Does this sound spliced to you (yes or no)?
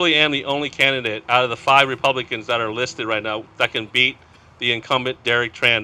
no